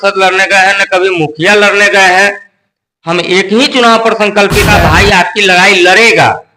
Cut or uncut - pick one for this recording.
cut